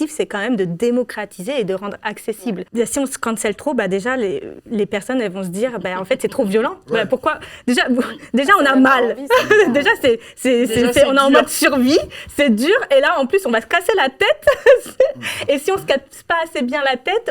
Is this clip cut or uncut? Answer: uncut